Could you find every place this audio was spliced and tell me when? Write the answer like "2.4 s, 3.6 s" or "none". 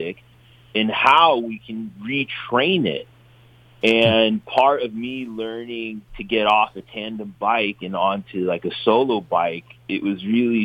none